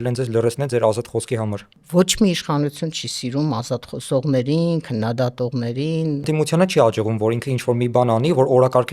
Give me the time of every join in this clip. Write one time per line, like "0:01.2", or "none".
0:01.8
0:06.3